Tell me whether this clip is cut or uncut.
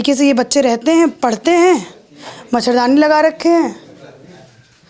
uncut